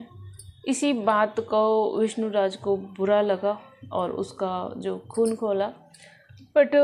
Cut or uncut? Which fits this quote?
uncut